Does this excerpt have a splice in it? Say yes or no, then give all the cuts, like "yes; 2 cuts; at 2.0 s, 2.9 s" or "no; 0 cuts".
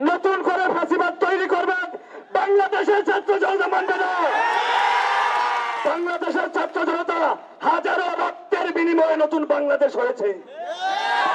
no; 0 cuts